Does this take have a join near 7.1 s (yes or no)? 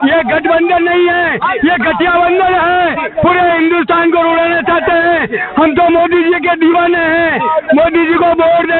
no